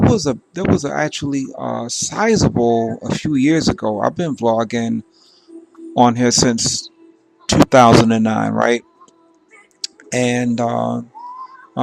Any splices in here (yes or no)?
no